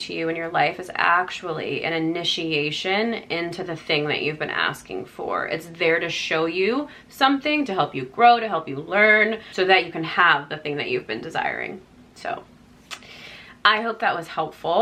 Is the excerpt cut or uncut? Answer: uncut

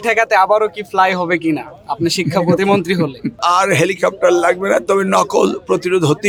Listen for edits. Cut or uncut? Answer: uncut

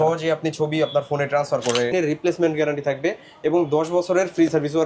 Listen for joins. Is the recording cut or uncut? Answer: cut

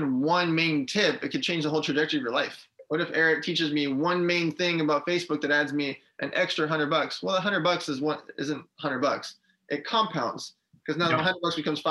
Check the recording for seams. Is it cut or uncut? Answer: cut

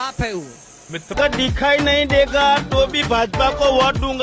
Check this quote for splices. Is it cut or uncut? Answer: cut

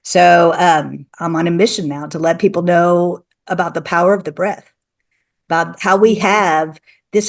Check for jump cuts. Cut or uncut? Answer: cut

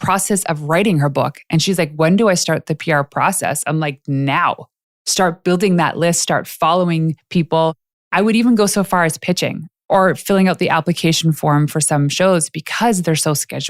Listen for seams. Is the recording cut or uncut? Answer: uncut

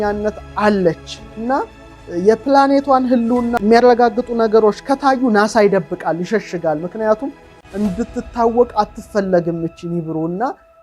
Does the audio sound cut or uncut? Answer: cut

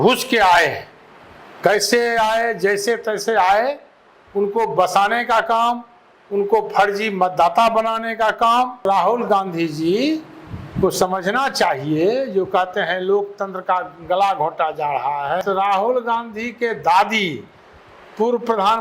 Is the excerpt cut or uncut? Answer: cut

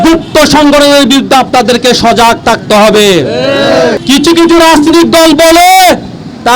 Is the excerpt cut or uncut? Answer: cut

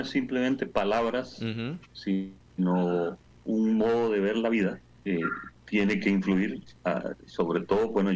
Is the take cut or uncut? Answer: cut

